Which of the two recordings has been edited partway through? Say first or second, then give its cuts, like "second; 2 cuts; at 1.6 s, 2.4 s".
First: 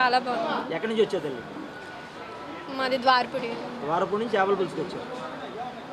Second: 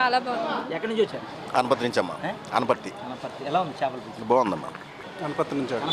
second; 2 cuts; at 1.1 s, 5.0 s